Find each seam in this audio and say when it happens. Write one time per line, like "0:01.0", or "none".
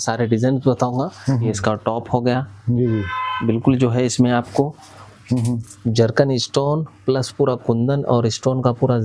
0:01.4